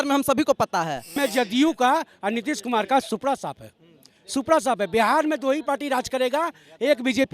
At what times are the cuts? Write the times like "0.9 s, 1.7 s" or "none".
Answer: 1.1 s